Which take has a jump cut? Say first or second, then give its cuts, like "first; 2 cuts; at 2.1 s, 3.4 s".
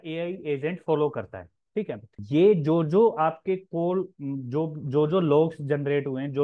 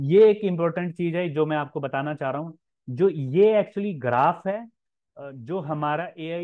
first; 1 cut; at 2.1 s